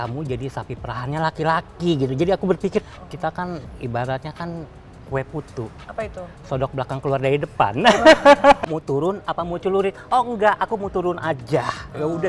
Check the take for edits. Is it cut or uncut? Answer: cut